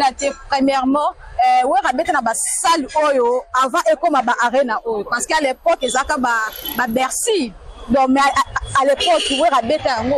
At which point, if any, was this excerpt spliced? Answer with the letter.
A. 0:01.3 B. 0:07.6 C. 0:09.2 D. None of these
D